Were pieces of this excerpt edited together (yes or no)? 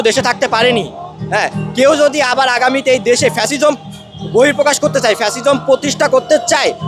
no